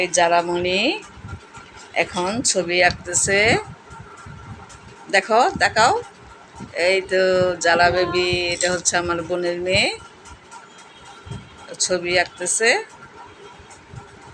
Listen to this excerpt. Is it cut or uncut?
uncut